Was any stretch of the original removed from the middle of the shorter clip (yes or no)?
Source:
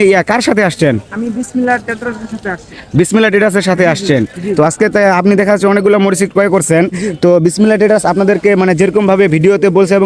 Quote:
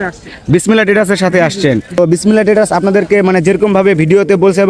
yes